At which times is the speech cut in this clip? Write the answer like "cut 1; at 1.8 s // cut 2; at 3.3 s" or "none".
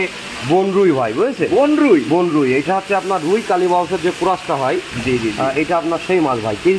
none

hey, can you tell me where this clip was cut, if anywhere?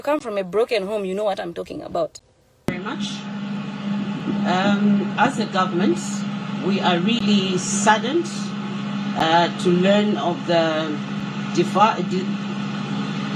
cut 1; at 2.5 s

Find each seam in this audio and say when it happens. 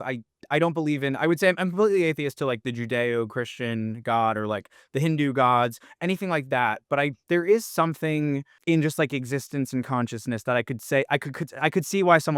cut 1; at 8.5 s

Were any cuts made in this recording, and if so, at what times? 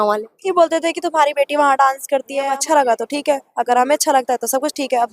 cut 1; at 2.5 s

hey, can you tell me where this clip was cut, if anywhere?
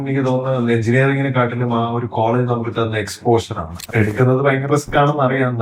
cut 1; at 3.8 s

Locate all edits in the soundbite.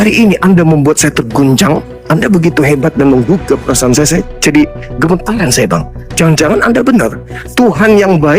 cut 1; at 1.9 s

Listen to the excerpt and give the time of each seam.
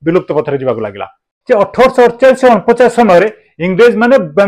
cut 1; at 1.1 s

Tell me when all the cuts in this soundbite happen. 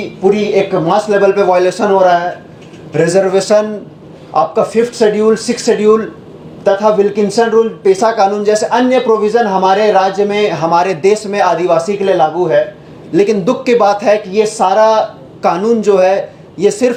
none

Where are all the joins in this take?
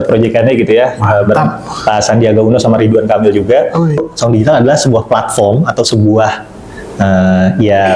cut 1; at 4.0 s

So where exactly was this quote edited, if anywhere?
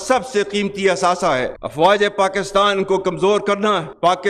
cut 1; at 1.5 s

